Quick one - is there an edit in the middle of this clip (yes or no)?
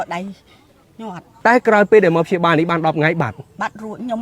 no